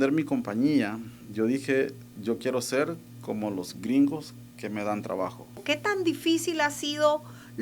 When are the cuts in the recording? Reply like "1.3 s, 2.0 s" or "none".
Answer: 5.6 s